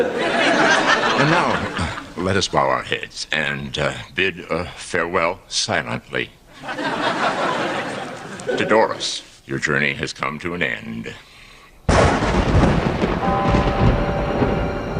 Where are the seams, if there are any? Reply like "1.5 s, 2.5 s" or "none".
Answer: 9.2 s